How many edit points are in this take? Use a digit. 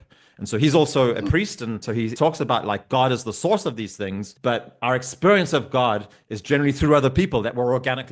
2